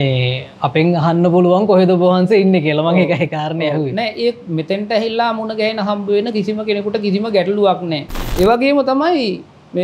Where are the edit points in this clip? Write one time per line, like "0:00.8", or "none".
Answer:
0:08.2